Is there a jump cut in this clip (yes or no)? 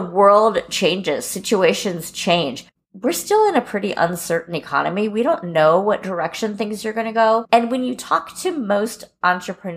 yes